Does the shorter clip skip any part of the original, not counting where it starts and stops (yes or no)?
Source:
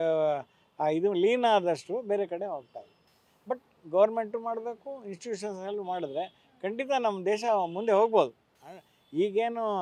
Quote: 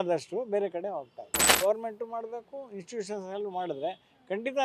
yes